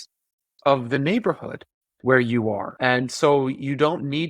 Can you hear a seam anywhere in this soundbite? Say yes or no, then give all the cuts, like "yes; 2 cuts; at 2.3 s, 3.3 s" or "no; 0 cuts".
yes; 1 cut; at 2.7 s